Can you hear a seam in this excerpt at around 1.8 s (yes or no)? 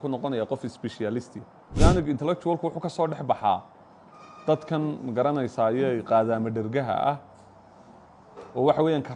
yes